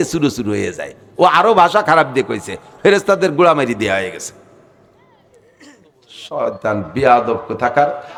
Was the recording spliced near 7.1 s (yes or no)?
no